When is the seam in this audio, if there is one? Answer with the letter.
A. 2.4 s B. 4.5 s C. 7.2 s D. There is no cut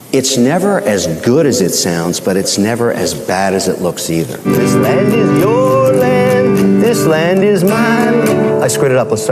B